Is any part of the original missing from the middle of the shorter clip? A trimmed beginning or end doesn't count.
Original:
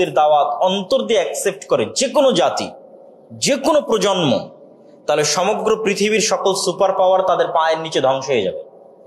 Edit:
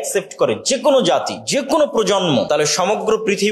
yes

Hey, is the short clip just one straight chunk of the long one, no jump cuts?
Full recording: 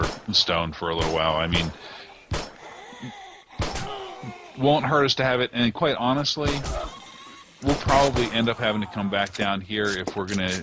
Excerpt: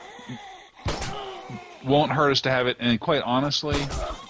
yes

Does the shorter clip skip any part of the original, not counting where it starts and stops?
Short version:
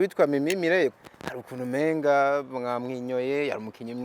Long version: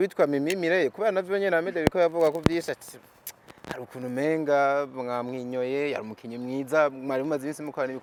yes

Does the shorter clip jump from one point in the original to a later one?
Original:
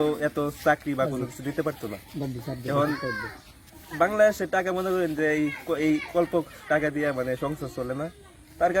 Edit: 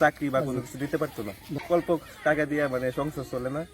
yes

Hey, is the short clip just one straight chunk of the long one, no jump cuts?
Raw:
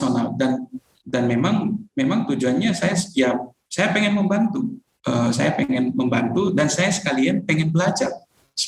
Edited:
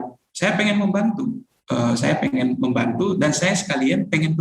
yes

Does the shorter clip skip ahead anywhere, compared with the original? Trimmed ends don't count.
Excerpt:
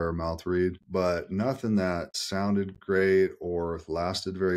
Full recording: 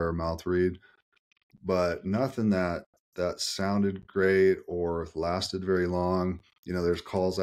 yes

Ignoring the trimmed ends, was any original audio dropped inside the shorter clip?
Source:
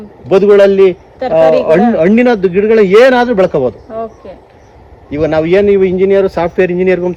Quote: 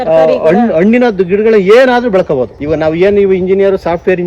yes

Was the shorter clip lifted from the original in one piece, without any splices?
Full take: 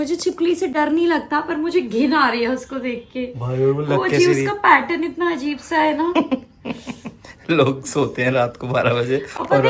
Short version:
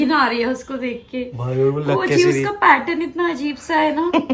yes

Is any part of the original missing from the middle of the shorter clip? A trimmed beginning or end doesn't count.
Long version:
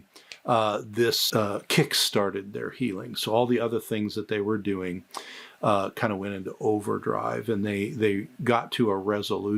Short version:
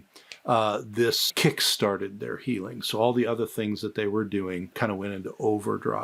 yes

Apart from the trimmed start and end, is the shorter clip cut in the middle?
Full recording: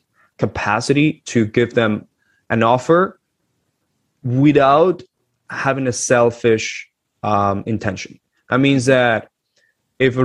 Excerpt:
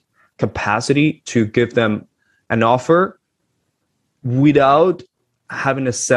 no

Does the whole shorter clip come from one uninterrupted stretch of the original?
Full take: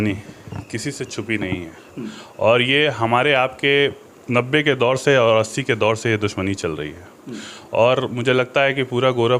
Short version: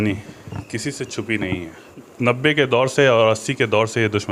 no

